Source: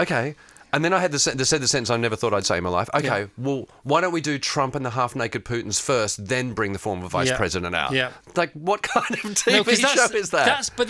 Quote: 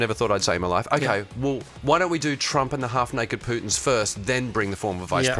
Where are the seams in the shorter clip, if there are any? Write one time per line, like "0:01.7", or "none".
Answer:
none